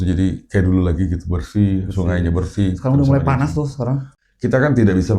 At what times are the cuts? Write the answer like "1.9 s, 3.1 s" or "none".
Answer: 4.1 s